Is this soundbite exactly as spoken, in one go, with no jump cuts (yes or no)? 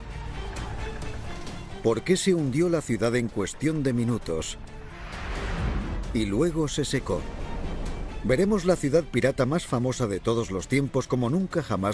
no